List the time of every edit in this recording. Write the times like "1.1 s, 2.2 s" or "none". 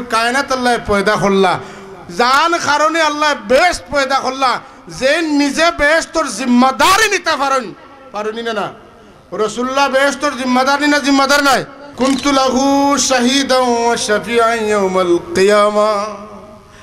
11.8 s